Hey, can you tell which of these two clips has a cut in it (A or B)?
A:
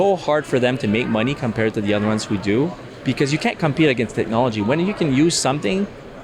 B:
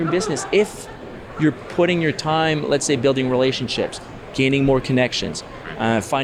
A